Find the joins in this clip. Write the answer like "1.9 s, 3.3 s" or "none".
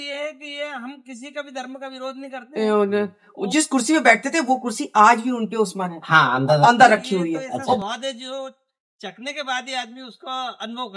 2.4 s, 7.8 s

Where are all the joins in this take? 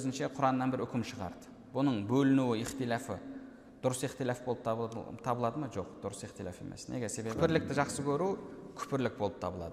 7.3 s

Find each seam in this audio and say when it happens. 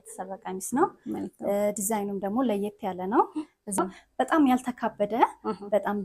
3.8 s

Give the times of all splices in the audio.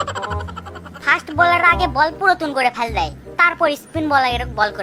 none

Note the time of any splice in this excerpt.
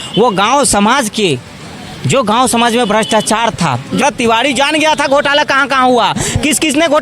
4.0 s

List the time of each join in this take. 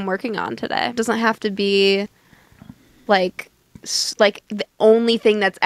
1.0 s

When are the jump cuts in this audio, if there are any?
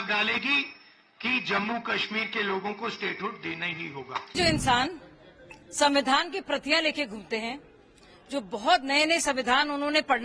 4.3 s

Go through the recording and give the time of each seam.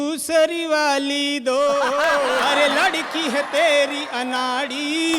2.5 s

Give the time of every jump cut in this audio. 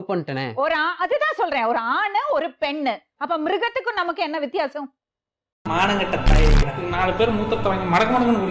none

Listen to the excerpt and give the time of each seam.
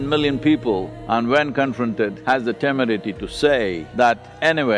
1.0 s, 2.2 s, 3.8 s

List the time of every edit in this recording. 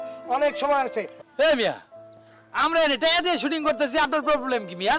1.2 s

